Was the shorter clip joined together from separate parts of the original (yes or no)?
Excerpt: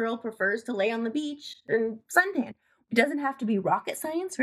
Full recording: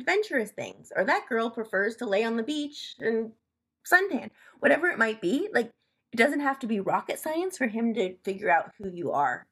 yes